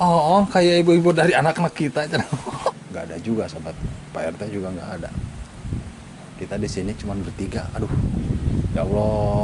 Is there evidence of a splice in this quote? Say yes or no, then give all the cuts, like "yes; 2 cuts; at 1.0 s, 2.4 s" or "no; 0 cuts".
yes; 1 cut; at 2.7 s